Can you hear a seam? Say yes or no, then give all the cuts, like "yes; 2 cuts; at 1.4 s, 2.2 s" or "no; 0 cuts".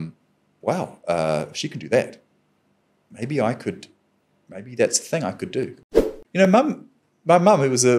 yes; 1 cut; at 5.7 s